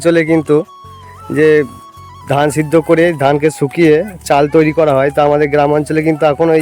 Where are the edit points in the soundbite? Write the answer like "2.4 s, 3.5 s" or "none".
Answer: none